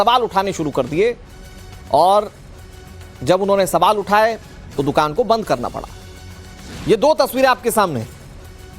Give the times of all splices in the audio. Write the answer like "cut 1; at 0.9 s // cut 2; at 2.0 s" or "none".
cut 1; at 7.4 s

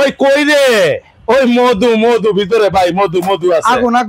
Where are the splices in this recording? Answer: none

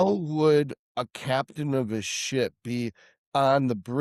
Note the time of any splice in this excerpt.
none

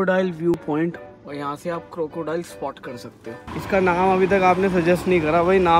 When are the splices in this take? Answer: cut 1; at 1.0 s // cut 2; at 3.4 s

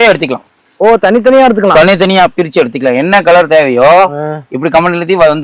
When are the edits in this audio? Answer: none

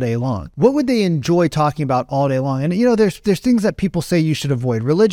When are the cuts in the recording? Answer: none

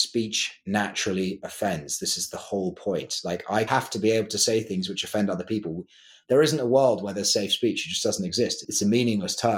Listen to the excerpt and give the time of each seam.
cut 1; at 3.7 s // cut 2; at 8.6 s

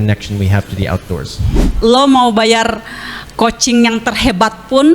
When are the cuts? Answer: cut 1; at 1.6 s

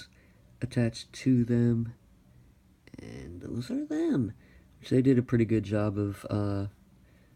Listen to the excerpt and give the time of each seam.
cut 1; at 5.1 s

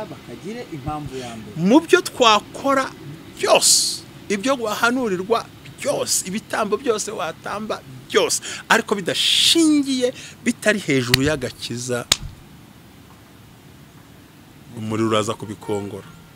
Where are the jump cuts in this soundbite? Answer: none

